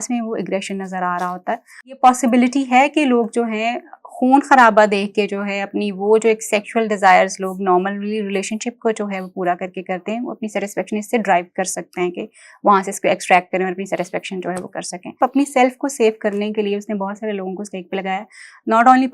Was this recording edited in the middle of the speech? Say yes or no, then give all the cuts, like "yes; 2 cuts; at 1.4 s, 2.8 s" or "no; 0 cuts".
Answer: yes; 2 cuts; at 2.0 s, 15.2 s